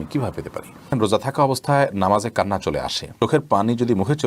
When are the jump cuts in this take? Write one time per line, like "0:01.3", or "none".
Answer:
0:00.9
0:03.0